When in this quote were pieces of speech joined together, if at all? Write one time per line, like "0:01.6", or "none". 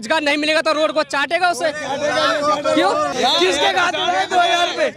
0:03.1